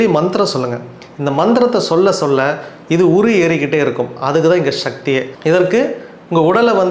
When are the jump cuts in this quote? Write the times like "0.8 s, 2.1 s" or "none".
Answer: 5.3 s